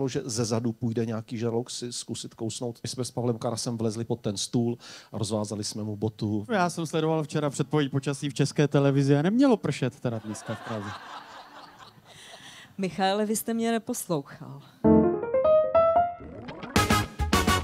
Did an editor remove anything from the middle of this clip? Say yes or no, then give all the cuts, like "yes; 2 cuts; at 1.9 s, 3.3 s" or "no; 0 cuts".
yes; 3 cuts; at 2.8 s, 6.5 s, 14.7 s